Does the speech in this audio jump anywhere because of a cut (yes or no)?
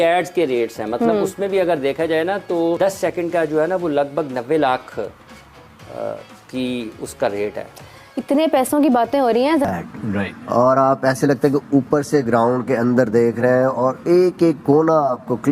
yes